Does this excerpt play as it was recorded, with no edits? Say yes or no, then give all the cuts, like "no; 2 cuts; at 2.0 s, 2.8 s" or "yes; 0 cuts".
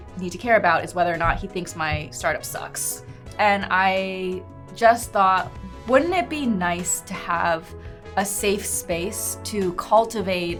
yes; 0 cuts